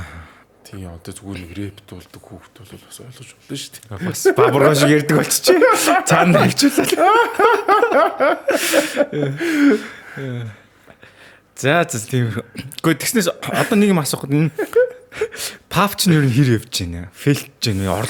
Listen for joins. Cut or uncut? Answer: uncut